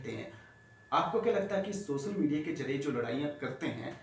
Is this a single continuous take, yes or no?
yes